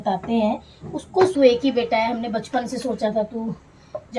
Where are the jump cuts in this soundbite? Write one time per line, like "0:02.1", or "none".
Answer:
0:01.3